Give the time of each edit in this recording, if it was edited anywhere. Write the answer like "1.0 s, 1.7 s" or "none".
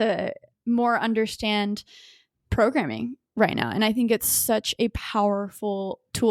none